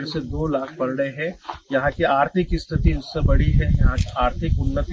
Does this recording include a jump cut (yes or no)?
no